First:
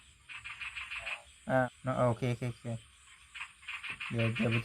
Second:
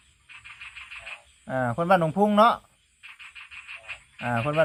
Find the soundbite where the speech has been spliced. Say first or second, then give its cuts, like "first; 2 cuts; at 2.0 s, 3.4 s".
first; 1 cut; at 1.6 s